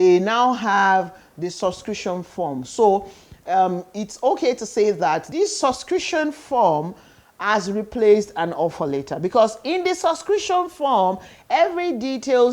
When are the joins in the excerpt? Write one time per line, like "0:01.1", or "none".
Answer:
0:05.3